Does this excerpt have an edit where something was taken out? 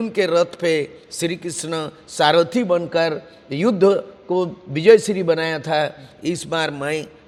no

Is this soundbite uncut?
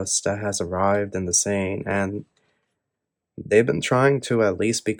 yes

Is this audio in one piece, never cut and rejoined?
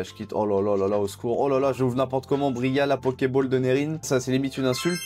no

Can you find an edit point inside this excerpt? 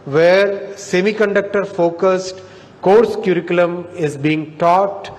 no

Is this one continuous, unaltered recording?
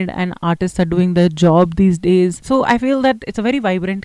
no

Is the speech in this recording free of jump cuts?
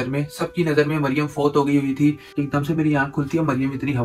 no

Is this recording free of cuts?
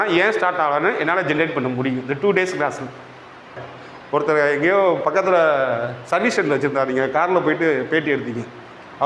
no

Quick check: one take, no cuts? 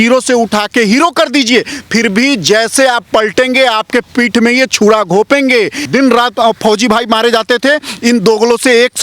no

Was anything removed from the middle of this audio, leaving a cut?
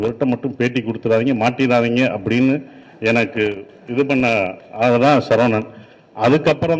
no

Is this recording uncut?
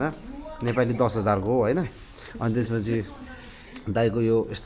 yes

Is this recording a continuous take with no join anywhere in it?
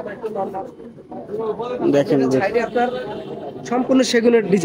yes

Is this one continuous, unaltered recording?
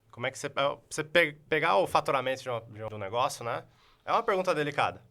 no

